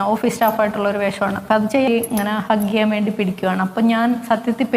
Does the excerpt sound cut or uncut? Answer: cut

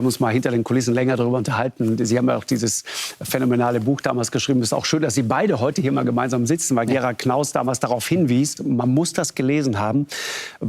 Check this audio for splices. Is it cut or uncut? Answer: cut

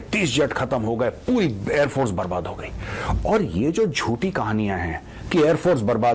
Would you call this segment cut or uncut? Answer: uncut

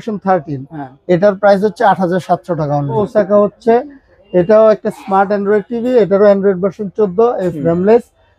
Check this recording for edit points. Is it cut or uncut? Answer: cut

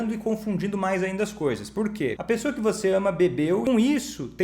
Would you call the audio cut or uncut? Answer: cut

